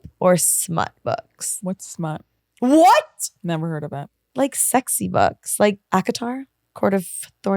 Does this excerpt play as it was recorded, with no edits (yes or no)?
no